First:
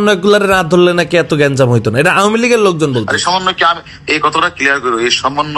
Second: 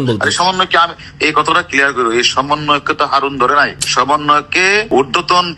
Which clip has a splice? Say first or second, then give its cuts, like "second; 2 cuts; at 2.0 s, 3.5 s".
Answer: second; 2 cuts; at 3.8 s, 4.9 s